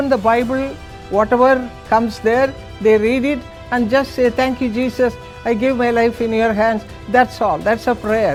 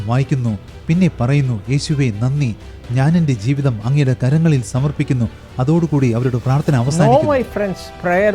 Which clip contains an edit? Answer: second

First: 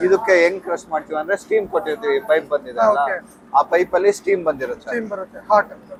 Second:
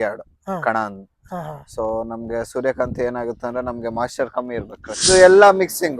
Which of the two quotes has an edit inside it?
second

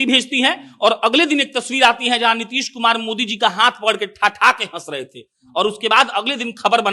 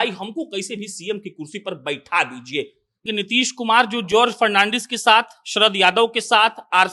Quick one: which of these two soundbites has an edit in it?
second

